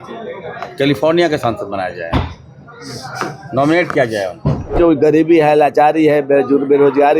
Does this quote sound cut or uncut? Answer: cut